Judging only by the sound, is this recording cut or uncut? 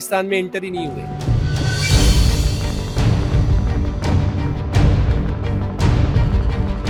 uncut